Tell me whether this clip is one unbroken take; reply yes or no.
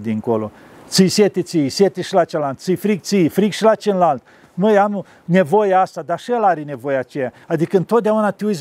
yes